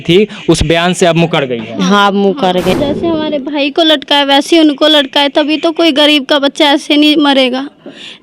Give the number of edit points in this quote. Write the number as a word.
one